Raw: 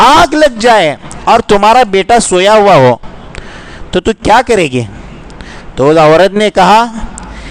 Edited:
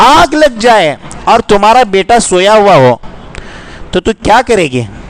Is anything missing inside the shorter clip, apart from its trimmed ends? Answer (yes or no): no